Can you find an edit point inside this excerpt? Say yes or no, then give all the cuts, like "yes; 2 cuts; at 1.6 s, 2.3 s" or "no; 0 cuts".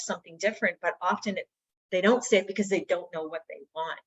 no; 0 cuts